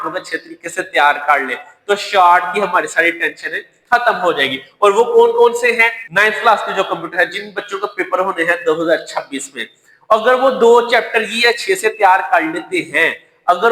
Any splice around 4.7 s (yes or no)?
no